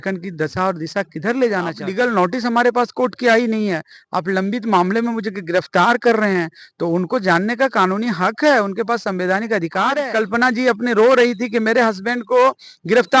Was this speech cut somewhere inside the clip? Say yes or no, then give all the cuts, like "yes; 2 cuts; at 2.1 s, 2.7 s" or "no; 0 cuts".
yes; 2 cuts; at 1.8 s, 10.0 s